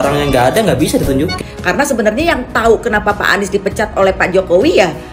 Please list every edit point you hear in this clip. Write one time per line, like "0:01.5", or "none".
0:01.3